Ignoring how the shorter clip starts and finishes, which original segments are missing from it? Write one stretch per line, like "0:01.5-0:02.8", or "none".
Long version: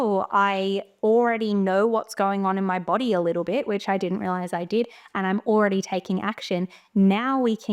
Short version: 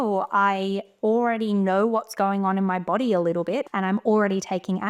0:03.6-0:05.1